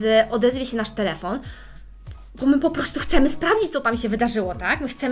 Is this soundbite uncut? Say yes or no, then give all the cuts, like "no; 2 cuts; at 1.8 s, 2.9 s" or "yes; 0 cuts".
yes; 0 cuts